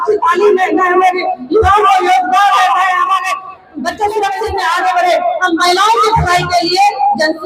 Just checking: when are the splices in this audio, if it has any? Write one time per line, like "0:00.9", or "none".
0:04.5